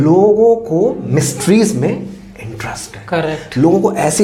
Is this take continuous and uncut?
yes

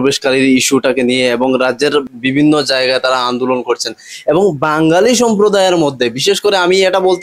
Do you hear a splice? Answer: yes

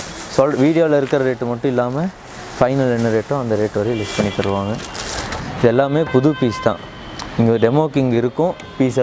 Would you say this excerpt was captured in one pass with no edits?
no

